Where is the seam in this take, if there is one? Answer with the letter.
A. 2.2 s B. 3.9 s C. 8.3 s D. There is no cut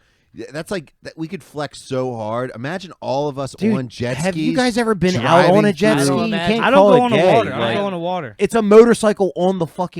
C